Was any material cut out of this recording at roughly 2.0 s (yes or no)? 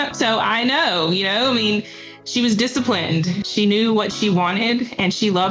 no